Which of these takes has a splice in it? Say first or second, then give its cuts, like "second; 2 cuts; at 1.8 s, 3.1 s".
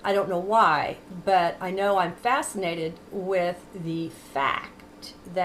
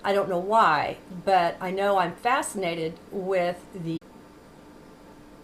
first; 1 cut; at 4.0 s